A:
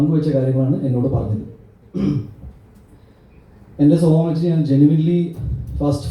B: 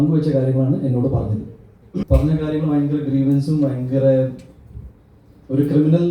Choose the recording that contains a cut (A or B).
B